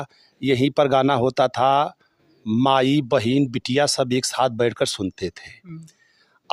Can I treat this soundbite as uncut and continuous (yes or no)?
yes